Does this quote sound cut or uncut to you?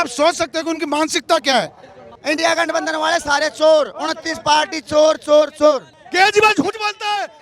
cut